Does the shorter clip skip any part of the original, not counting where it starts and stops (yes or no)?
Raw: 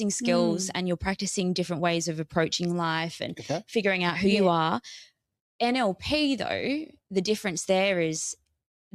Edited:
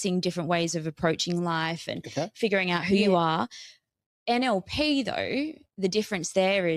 no